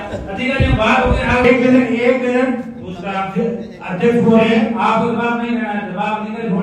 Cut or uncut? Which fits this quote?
cut